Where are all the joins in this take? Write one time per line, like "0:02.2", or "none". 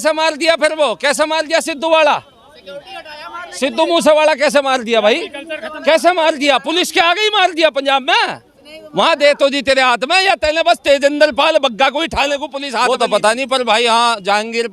0:12.8